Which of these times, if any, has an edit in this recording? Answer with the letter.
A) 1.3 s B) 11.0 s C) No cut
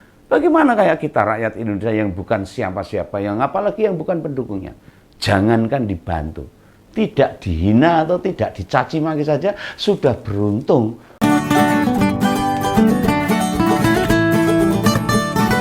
B